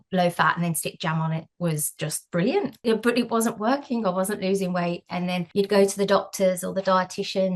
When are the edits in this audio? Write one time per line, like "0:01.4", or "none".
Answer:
0:02.8
0:05.4

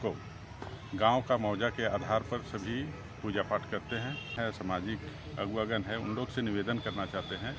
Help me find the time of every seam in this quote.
0:04.4

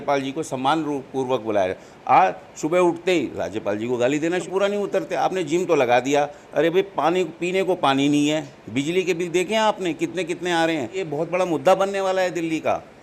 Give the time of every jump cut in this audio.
0:04.4
0:11.0

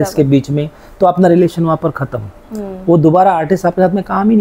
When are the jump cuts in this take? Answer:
none

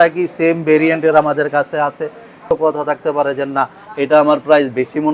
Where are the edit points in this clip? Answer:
0:02.4

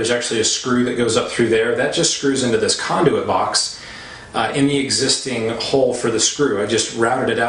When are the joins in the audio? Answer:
0:05.3

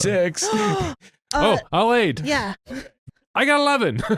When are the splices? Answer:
0:02.6

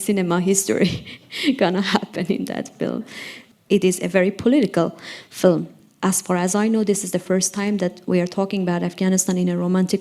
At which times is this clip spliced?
0:03.5
0:05.8

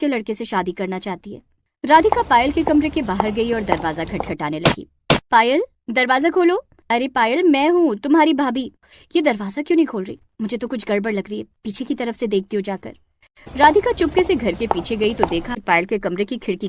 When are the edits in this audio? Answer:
0:15.6

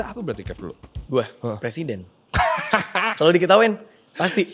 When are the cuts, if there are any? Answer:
0:02.1

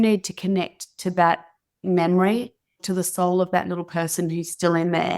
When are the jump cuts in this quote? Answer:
0:02.8

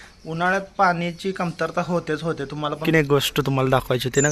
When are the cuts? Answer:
0:02.7

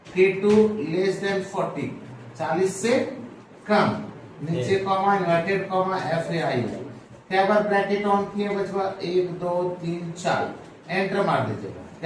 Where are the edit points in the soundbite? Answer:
none

